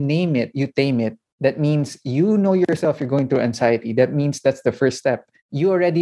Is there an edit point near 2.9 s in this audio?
no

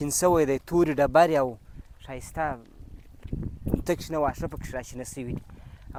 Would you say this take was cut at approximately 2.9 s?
no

